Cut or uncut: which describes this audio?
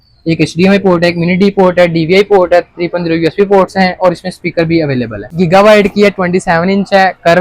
cut